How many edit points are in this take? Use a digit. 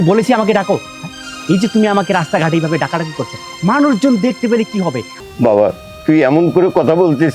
1